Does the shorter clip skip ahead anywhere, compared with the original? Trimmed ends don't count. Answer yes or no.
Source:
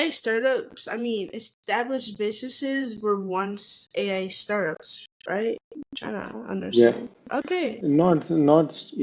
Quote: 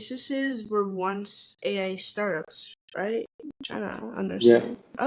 no